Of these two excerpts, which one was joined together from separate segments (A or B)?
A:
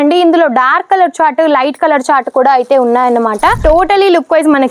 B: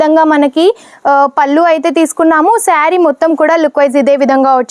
A